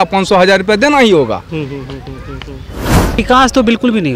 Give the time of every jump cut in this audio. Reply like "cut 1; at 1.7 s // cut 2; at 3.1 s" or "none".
cut 1; at 3.2 s